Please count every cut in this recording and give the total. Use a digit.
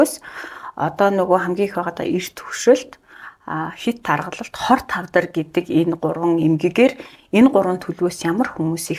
0